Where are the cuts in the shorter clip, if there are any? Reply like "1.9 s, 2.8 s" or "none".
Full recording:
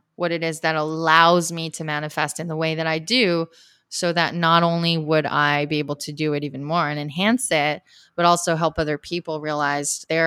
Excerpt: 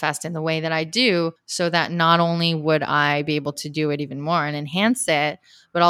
1.4 s